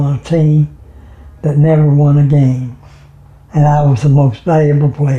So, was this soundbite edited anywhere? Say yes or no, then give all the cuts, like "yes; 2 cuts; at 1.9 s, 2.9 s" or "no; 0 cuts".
no; 0 cuts